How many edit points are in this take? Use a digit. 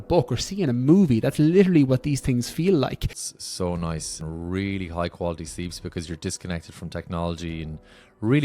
2